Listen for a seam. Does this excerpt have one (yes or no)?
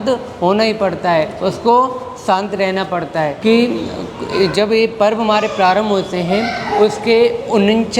yes